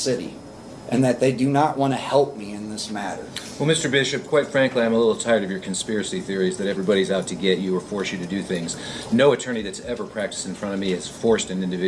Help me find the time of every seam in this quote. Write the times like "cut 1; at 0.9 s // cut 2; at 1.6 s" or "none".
none